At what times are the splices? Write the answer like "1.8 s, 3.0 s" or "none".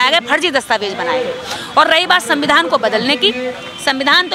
none

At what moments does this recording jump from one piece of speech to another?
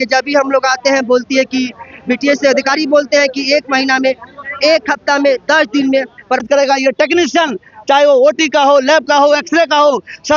6.4 s

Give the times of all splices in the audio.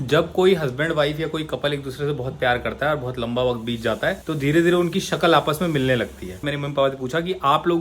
6.4 s

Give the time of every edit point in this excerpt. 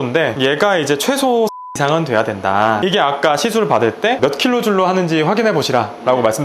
1.7 s, 2.8 s

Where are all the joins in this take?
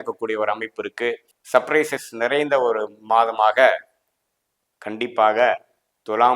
1.3 s

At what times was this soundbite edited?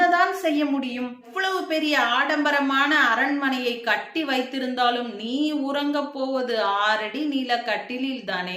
1.3 s

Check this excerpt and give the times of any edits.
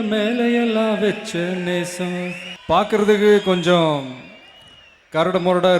2.5 s

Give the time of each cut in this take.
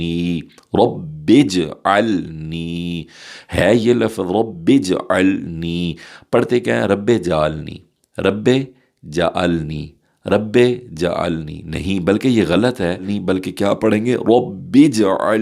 13.1 s

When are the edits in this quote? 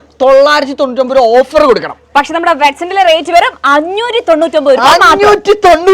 none

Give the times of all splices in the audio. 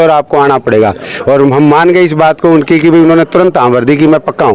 none

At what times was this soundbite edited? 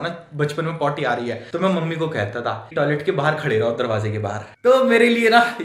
1.4 s, 2.6 s, 4.5 s

